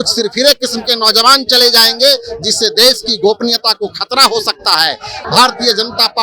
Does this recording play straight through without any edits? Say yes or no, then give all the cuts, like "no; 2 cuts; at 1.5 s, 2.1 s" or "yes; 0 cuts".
no; 1 cut; at 5.2 s